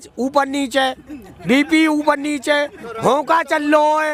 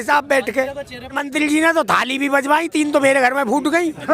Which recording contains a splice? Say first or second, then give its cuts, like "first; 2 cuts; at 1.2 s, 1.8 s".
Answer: second; 1 cut; at 1.1 s